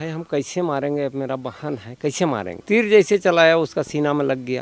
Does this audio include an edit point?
yes; 1 cut; at 2.6 s

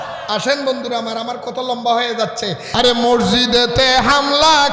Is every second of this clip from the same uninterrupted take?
no; 1 cut; at 2.7 s

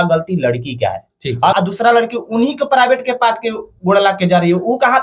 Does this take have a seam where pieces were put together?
yes; 1 cut; at 1.5 s

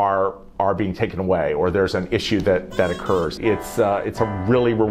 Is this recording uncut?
no; 1 cut; at 3.3 s

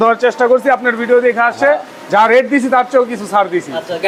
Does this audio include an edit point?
no; 0 cuts

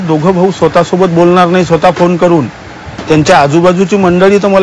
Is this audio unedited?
yes; 0 cuts

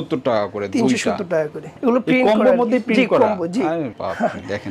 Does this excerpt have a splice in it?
yes; 1 cut; at 1.8 s

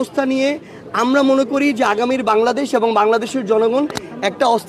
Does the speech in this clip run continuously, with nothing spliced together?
yes; 0 cuts

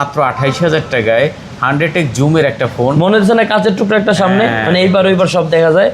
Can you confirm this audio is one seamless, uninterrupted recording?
yes; 0 cuts

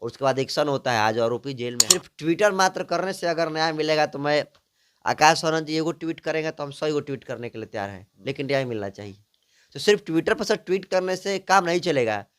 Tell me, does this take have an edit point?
yes; 1 cut; at 2.1 s

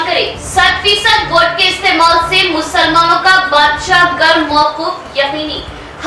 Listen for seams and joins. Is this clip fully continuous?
yes; 0 cuts

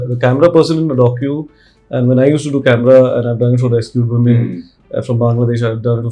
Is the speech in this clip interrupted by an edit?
no; 0 cuts

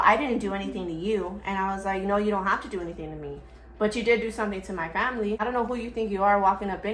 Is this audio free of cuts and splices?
no; 1 cut; at 5.4 s

